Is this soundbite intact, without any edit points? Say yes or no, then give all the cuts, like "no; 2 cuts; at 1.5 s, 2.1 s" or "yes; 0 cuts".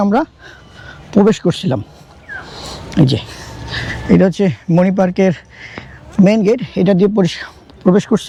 yes; 0 cuts